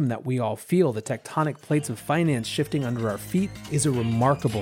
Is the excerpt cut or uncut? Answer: cut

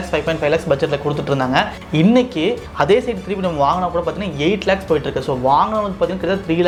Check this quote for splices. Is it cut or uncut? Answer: uncut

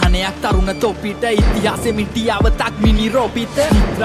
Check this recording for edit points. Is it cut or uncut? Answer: uncut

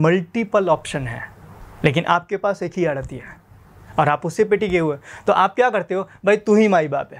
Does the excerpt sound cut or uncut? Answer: uncut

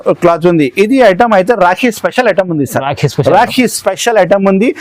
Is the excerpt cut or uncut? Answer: uncut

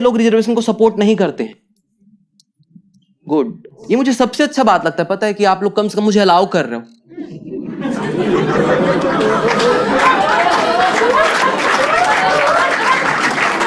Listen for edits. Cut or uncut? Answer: cut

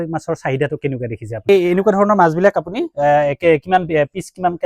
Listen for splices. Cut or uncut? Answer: cut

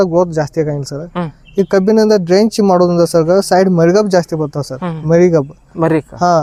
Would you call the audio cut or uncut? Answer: uncut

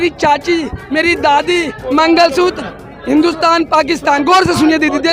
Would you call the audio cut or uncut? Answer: cut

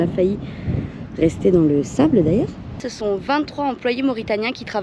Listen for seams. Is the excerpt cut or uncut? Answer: cut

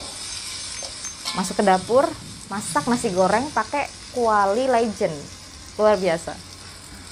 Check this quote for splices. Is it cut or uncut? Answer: uncut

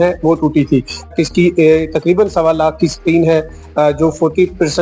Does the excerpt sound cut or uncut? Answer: cut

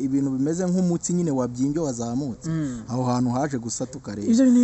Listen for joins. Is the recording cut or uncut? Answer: uncut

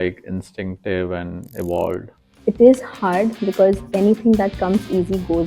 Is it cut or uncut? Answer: cut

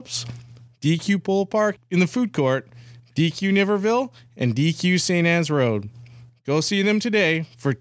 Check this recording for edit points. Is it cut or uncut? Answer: cut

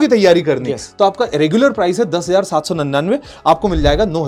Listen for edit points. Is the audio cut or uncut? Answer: uncut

